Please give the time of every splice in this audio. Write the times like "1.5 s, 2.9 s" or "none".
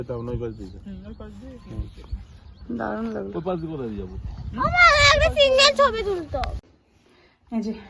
6.6 s